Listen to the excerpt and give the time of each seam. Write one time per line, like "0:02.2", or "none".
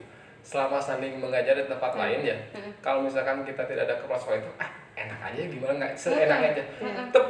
none